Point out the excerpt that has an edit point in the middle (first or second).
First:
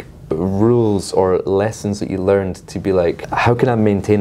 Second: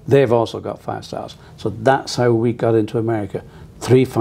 first